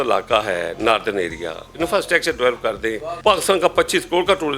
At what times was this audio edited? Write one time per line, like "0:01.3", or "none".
0:03.1